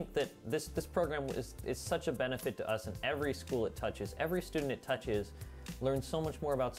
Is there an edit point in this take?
no; 0 cuts

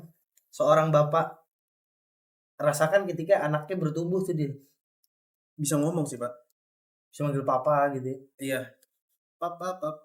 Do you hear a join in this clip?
no; 0 cuts

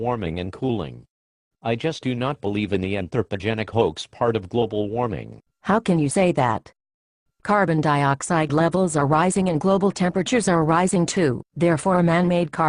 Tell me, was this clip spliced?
no; 0 cuts

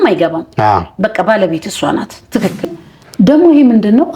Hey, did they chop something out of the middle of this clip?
yes; 1 cut; at 2.6 s

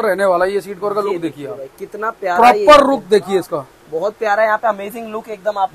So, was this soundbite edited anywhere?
no; 0 cuts

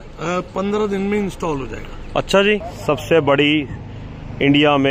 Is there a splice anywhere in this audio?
yes; 1 cut; at 2.7 s

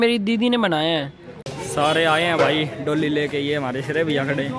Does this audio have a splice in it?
yes; 1 cut; at 1.5 s

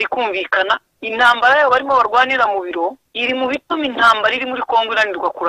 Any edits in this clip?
yes; 1 cut; at 3.1 s

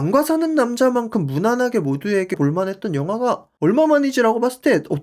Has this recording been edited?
no; 0 cuts

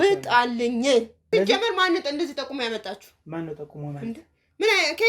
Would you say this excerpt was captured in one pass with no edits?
no; 1 cut; at 1.2 s

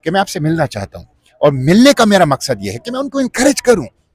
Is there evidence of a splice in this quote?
no; 0 cuts

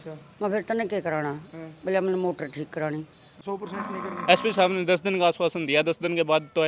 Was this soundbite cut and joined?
yes; 1 cut; at 3.4 s

